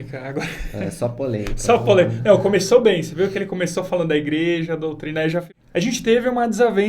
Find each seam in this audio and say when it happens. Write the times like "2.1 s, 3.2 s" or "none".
5.5 s